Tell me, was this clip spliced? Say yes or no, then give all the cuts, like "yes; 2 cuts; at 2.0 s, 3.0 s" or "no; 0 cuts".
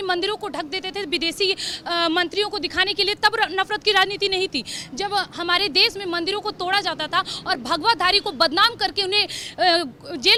no; 0 cuts